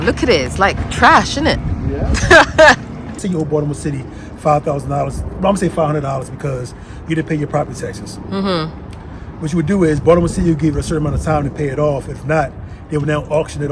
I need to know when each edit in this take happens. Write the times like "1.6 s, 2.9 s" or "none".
3.2 s